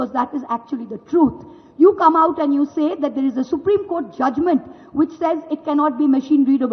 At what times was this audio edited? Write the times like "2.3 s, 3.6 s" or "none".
none